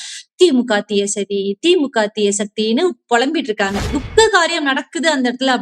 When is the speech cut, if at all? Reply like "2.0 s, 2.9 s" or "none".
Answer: 3.9 s